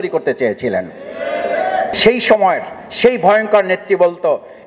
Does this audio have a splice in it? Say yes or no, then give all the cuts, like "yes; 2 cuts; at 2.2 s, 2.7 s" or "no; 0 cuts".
yes; 1 cut; at 1.9 s